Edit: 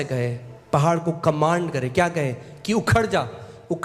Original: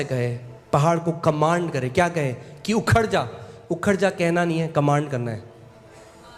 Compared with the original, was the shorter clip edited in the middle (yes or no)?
no